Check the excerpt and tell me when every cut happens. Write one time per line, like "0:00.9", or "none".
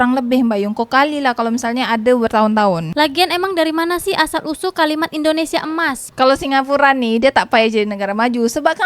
0:02.9
0:06.1